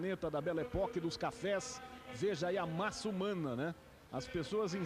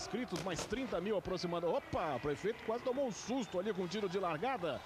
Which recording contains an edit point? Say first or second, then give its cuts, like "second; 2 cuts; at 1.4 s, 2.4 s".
first; 1 cut; at 0.9 s